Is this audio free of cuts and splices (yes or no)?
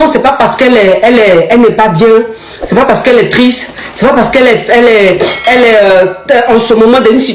yes